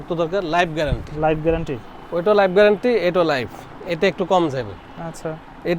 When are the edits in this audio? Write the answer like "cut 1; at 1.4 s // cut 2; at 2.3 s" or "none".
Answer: none